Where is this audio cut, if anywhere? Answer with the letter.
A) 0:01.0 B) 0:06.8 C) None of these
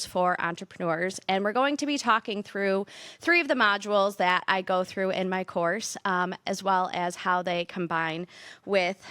C